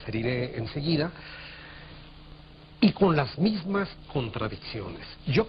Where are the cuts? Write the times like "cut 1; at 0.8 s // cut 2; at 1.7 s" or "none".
none